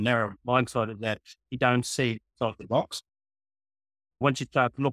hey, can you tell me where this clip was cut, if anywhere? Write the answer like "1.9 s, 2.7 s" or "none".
2.3 s, 4.2 s